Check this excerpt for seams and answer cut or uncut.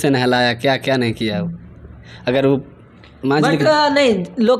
uncut